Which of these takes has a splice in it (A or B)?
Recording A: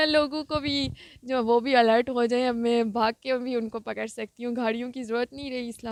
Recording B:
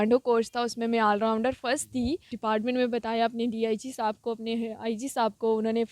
B